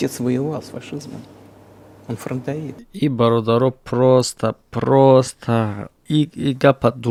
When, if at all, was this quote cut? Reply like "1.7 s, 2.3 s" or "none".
none